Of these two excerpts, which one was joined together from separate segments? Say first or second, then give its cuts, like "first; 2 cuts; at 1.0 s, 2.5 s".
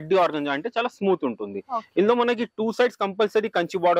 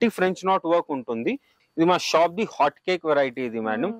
second; 1 cut; at 1.5 s